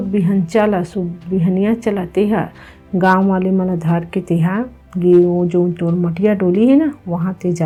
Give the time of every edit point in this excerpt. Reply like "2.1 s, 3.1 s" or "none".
none